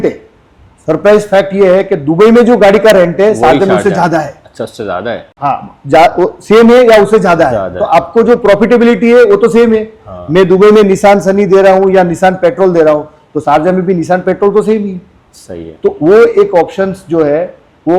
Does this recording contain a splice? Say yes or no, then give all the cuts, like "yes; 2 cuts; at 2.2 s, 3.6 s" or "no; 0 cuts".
no; 0 cuts